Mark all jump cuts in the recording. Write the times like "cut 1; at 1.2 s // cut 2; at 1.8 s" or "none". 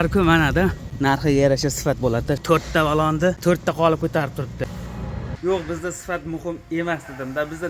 cut 1; at 0.9 s // cut 2; at 2.4 s // cut 3; at 3.4 s // cut 4; at 5.2 s

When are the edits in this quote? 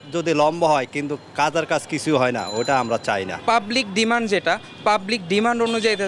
cut 1; at 3.3 s

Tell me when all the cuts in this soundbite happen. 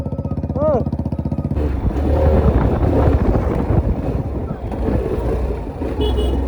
cut 1; at 1.5 s

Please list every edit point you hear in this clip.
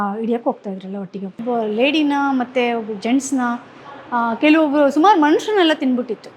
cut 1; at 1.3 s

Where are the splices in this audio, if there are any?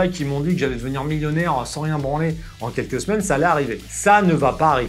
cut 1; at 3.8 s

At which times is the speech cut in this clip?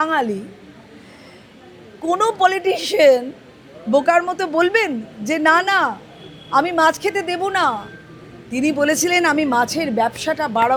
none

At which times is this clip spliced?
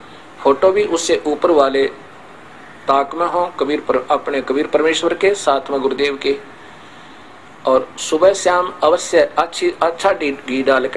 none

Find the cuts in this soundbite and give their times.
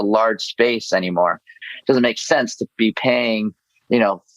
cut 1; at 1.5 s

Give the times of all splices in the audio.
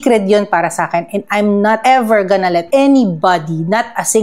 none

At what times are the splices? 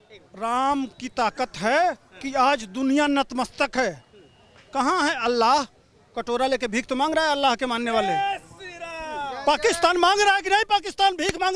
none

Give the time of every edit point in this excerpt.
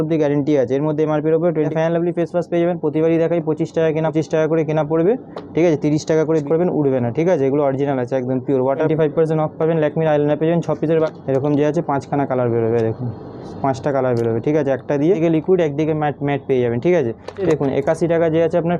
cut 1; at 1.7 s // cut 2; at 4.1 s // cut 3; at 6.4 s // cut 4; at 8.9 s // cut 5; at 11.1 s // cut 6; at 15.2 s // cut 7; at 17.4 s

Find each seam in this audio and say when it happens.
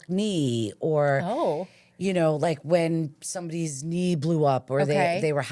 none

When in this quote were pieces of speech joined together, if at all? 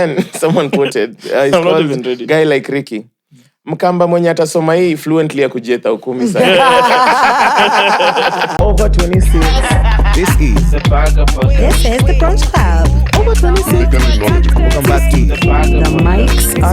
cut 1; at 8.6 s

